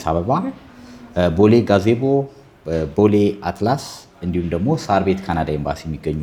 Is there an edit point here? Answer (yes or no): no